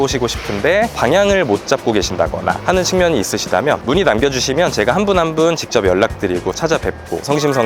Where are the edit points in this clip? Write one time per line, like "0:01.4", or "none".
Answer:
0:00.9
0:03.8